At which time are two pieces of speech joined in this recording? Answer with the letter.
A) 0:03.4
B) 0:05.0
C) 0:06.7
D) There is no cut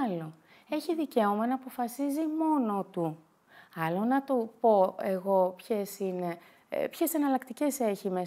D